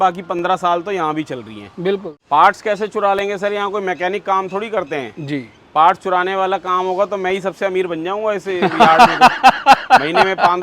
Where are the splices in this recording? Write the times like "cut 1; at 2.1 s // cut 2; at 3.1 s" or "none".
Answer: cut 1; at 2.1 s